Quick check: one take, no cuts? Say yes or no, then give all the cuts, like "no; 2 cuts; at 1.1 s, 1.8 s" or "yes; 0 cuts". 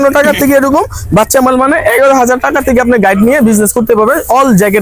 yes; 0 cuts